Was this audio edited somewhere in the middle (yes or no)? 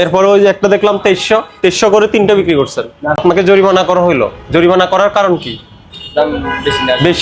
yes